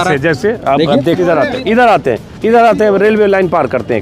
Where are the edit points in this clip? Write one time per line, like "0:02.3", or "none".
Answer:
0:01.2